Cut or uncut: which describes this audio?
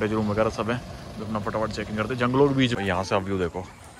cut